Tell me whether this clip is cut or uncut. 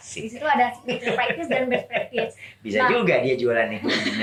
uncut